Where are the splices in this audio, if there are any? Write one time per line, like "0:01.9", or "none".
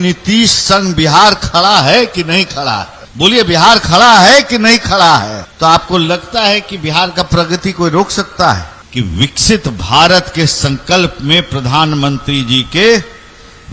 0:03.0
0:05.4
0:08.8